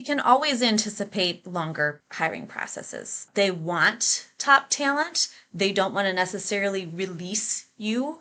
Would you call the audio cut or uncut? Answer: cut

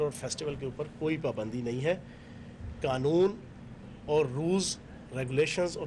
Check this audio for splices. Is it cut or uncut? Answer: cut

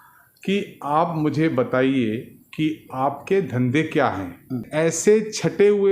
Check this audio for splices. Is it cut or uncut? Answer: cut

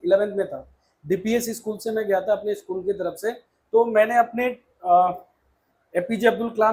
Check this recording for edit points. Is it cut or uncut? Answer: uncut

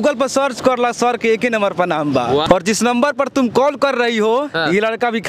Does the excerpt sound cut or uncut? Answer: cut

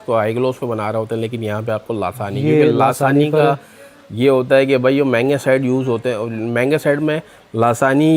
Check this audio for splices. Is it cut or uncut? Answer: uncut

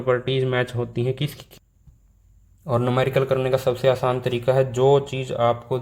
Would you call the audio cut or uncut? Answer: cut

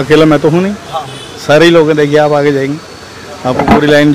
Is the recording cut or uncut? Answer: uncut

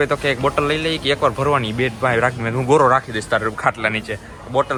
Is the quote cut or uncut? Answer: uncut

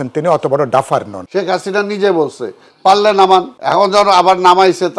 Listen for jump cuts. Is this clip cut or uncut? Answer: cut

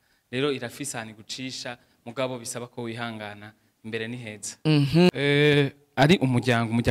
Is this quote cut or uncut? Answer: cut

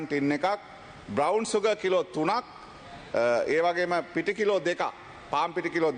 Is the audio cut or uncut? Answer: uncut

